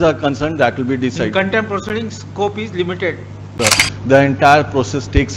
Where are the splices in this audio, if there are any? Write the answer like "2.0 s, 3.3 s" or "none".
3.5 s